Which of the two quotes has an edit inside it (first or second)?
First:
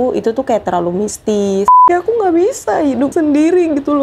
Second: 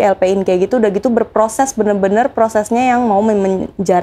first